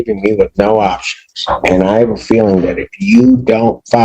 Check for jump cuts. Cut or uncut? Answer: uncut